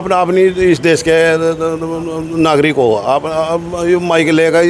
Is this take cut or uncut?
uncut